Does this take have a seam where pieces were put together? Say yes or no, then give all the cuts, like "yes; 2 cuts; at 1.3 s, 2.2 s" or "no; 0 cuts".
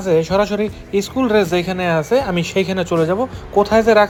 no; 0 cuts